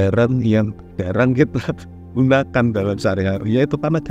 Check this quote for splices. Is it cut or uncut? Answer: cut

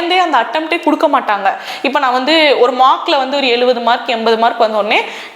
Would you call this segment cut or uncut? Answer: uncut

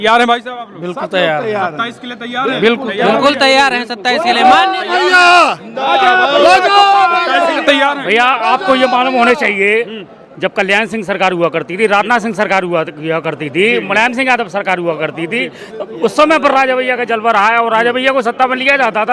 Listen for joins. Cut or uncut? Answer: uncut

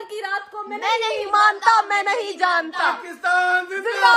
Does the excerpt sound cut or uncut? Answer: uncut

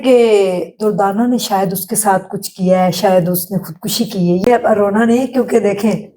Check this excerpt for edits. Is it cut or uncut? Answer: cut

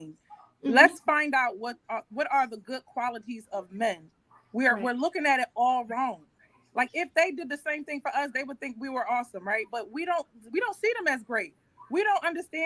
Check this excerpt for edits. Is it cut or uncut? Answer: uncut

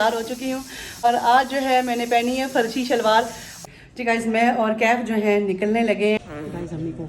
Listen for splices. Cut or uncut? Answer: cut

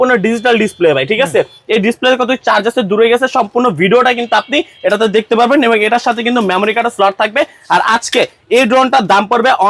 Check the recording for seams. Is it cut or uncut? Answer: uncut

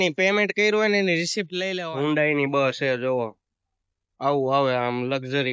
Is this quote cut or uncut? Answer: cut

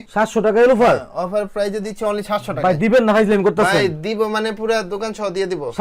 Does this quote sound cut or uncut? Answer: uncut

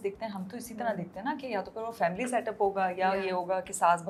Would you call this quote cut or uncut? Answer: uncut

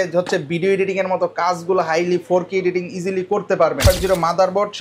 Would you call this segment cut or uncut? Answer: cut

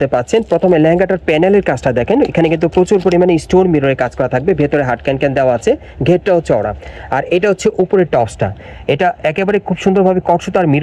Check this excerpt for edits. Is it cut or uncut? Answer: uncut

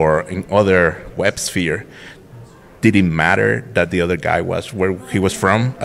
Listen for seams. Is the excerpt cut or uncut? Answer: uncut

